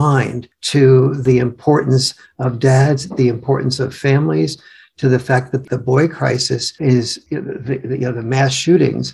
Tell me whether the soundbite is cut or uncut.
uncut